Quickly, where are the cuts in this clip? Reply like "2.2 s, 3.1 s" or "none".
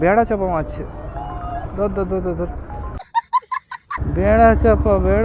4.0 s